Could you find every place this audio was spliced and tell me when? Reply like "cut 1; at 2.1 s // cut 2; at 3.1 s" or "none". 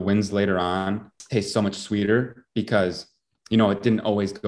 cut 1; at 1.1 s